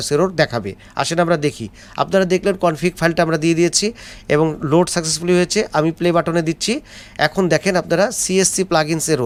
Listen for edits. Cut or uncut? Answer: uncut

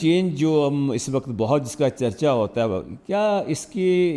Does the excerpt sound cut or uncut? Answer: uncut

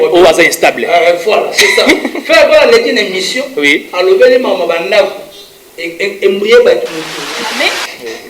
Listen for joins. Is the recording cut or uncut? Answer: cut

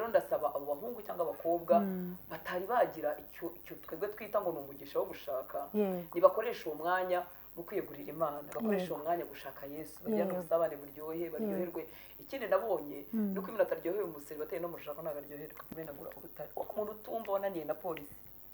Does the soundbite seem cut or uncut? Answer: cut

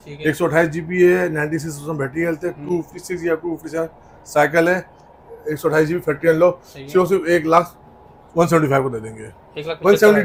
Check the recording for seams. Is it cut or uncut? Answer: uncut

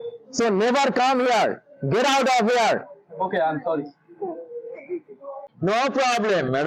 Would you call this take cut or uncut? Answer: cut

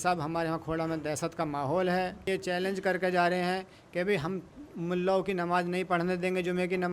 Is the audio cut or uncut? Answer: cut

